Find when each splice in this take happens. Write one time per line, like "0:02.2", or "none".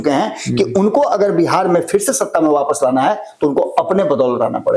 none